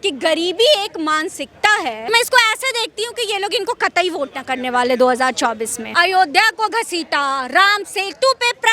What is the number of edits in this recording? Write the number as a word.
two